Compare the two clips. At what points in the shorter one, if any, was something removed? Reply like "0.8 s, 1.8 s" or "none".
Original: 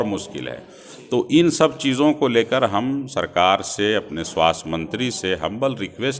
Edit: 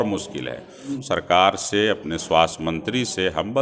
0.9 s

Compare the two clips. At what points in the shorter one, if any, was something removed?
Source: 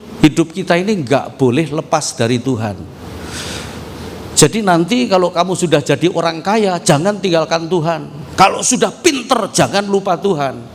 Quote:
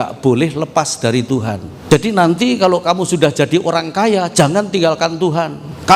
1.7 s

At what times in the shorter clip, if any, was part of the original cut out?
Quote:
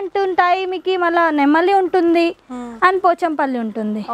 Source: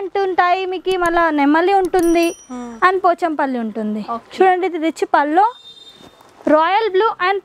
none

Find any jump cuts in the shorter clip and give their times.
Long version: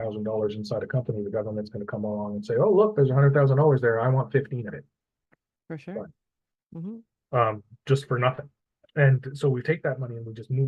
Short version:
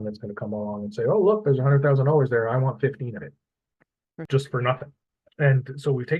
4.1 s

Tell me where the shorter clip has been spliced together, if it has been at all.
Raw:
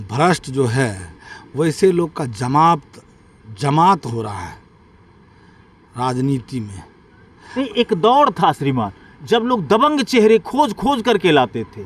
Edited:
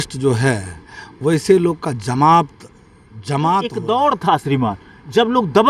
3.7 s

